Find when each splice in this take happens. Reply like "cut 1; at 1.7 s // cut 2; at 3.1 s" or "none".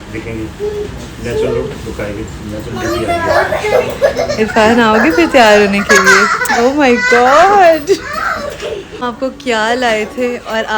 cut 1; at 9.0 s